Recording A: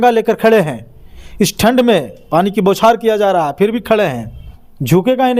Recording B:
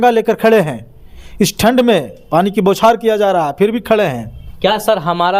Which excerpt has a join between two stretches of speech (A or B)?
A